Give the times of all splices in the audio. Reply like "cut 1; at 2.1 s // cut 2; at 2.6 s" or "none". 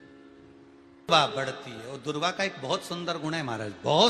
cut 1; at 1.1 s